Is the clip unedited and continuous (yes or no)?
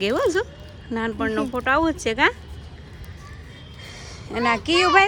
yes